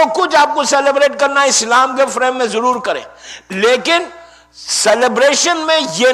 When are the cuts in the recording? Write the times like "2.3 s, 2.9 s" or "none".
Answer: none